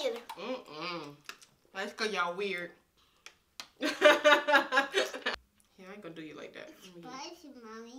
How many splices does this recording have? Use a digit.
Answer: 1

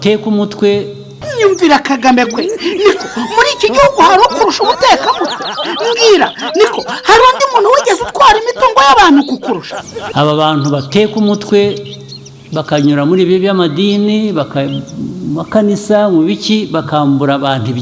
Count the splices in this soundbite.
2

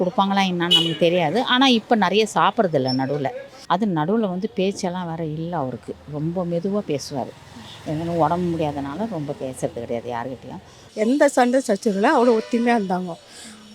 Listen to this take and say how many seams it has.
2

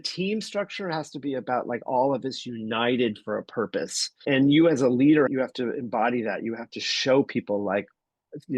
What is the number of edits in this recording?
2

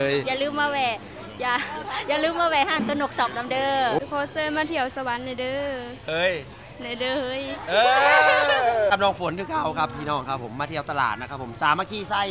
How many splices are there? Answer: 2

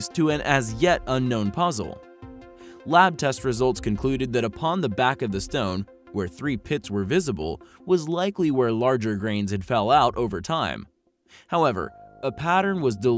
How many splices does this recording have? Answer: 1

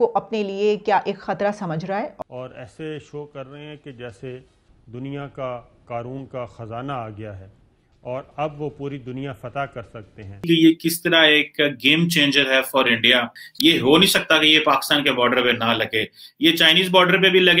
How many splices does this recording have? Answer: 3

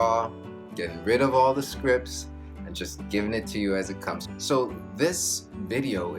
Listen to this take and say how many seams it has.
1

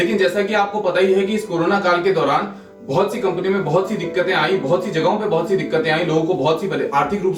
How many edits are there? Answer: 0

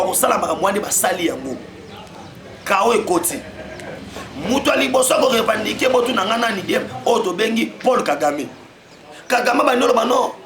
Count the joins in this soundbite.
0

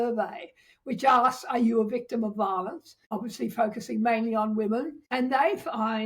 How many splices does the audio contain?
2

